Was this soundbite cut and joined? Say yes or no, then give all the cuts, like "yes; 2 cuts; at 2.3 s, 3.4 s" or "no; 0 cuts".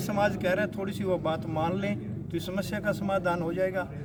no; 0 cuts